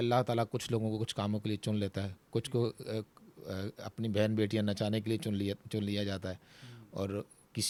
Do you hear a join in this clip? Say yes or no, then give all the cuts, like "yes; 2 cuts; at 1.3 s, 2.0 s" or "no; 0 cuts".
no; 0 cuts